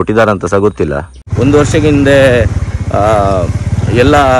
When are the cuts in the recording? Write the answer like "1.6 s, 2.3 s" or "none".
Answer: 1.2 s

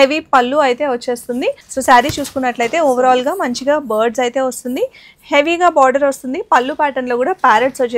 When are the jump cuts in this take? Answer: 1.7 s

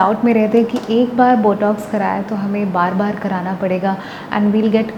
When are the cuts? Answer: none

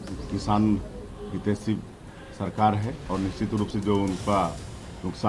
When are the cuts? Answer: 3.0 s

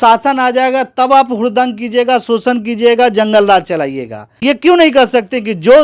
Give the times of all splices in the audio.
4.5 s

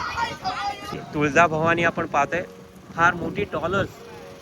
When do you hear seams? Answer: 0.9 s

